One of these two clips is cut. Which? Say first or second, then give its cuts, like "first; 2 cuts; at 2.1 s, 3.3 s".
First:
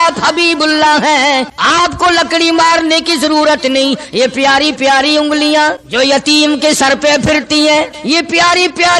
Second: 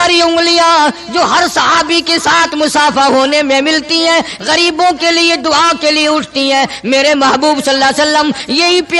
first; 3 cuts; at 1.5 s, 5.8 s, 8.0 s